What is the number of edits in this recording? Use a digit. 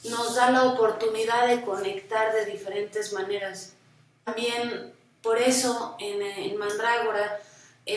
1